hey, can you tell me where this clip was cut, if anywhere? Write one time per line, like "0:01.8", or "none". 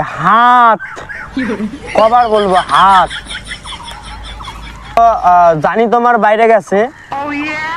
none